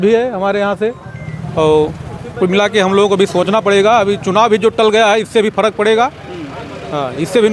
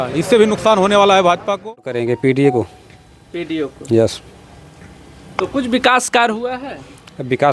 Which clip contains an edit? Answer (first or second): second